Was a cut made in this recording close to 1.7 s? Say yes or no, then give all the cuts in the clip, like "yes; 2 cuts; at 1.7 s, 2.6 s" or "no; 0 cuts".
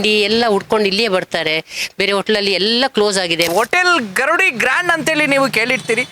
no; 1 cut; at 3.5 s